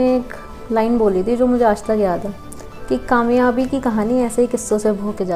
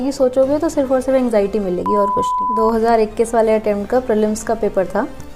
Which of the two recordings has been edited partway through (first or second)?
second